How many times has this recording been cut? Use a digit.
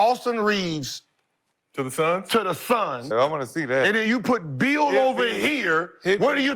1